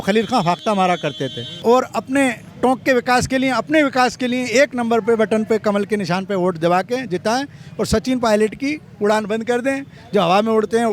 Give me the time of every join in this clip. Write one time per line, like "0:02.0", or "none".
0:01.4